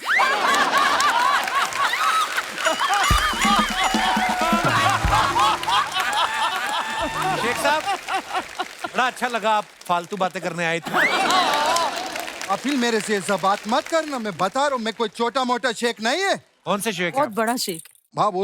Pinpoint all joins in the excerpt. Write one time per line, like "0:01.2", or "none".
0:07.5

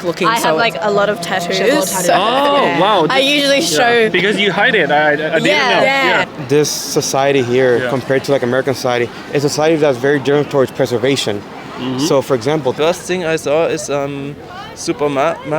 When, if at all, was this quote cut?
0:06.2
0:12.8

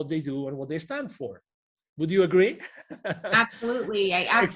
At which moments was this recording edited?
none

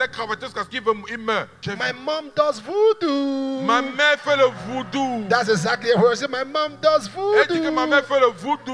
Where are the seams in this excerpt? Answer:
0:01.6

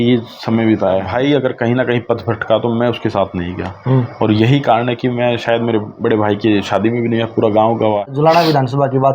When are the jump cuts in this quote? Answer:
0:01.1
0:08.1

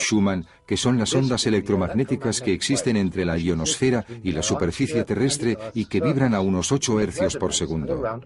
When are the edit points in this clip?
0:04.3

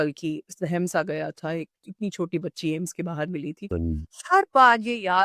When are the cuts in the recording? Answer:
0:03.6

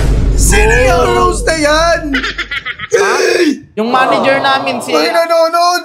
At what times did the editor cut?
0:03.7

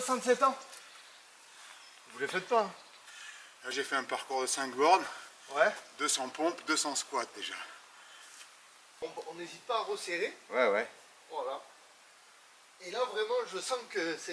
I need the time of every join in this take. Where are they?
0:09.0

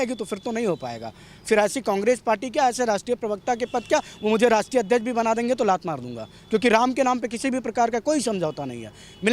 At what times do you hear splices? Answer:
none

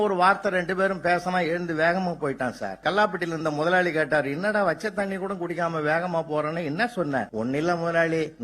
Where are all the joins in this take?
0:02.8
0:07.3

